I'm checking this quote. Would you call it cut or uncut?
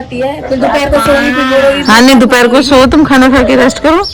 uncut